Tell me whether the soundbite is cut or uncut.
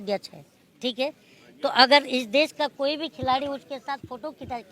uncut